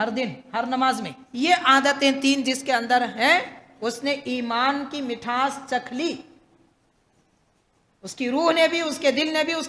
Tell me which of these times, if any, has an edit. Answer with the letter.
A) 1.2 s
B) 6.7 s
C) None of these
A